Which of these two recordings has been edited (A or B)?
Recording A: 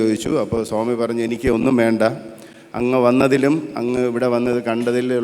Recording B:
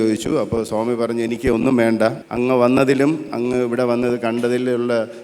B